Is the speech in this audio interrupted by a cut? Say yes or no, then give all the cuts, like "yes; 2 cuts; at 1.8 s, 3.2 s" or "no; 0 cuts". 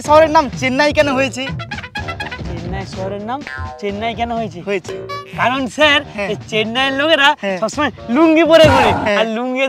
no; 0 cuts